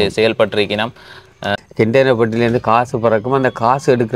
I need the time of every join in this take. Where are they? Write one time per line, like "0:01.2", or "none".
0:01.5